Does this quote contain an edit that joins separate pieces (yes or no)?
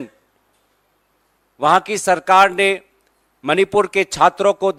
no